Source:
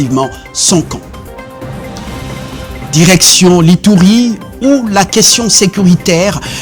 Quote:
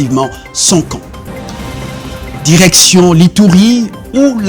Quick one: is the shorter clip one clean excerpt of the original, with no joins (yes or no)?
no